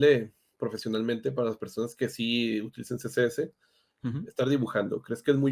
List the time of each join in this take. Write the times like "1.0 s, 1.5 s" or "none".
none